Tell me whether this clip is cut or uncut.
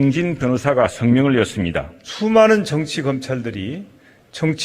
cut